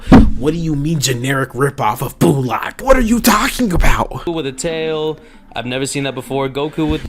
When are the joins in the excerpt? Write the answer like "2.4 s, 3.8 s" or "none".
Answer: 2.7 s, 4.3 s